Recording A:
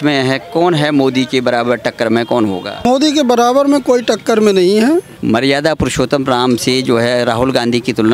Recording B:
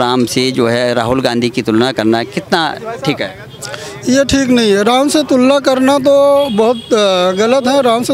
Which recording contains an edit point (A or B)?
A